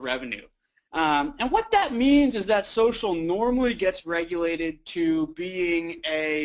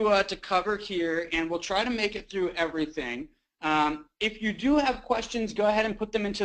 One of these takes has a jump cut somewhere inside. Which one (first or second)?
first